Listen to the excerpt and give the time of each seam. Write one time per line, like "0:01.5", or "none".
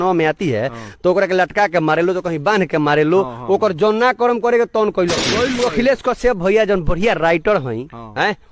0:05.6